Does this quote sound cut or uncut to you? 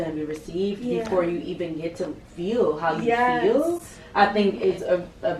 uncut